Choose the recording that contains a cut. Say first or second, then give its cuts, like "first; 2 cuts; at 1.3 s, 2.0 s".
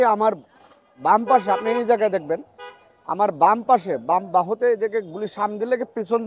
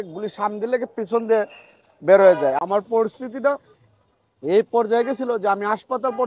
second; 1 cut; at 2.6 s